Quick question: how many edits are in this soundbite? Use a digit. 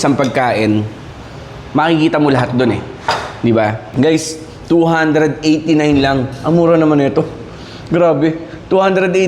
1